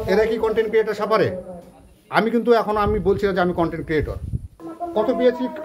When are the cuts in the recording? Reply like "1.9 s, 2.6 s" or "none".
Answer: 4.5 s